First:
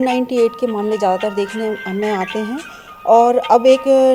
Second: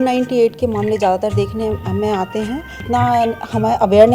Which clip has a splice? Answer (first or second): second